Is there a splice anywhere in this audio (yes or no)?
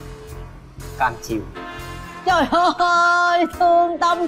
no